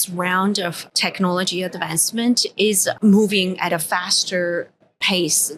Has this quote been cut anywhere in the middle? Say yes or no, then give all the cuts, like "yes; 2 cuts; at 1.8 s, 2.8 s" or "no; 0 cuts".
yes; 2 cuts; at 0.9 s, 3.0 s